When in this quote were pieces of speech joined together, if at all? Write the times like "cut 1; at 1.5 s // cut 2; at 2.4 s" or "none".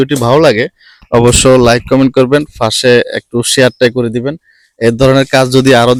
none